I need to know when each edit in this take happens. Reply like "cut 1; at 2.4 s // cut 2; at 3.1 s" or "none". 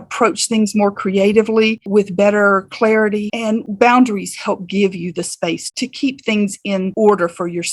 cut 1; at 3.7 s

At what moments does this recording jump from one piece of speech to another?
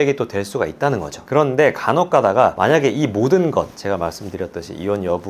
none

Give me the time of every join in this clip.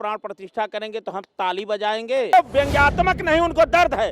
cut 1; at 2.3 s

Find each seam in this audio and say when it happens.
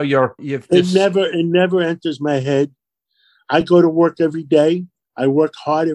none

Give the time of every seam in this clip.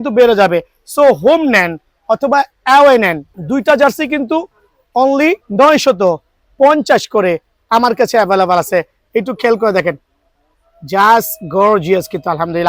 cut 1; at 3.3 s // cut 2; at 5.4 s

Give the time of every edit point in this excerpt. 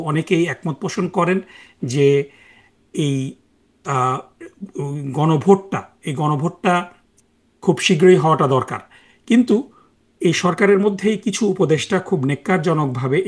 none

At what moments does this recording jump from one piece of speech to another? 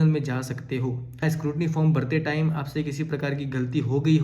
cut 1; at 1.2 s

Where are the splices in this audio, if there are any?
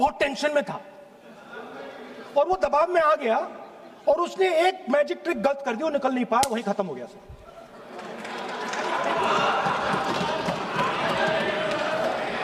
none

